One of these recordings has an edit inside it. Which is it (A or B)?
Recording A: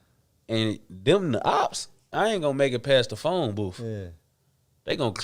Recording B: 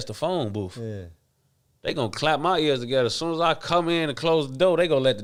A